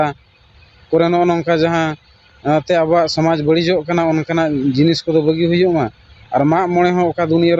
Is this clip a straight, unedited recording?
yes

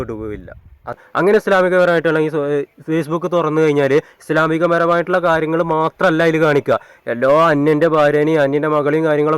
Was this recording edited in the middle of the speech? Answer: yes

